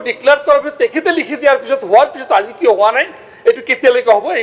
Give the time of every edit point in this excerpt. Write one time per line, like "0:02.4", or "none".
none